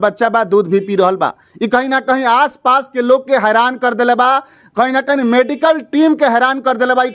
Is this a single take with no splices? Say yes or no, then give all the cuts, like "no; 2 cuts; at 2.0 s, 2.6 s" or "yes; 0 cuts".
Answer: yes; 0 cuts